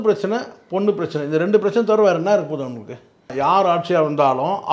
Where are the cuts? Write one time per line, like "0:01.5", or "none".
0:03.2